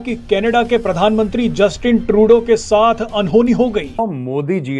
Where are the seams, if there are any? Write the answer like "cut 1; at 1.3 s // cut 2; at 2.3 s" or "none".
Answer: cut 1; at 3.9 s